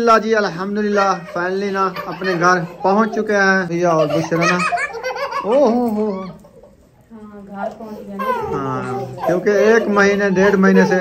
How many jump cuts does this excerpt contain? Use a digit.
1